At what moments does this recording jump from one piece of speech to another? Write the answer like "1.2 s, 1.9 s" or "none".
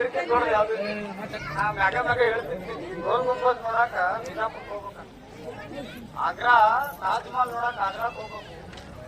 1.3 s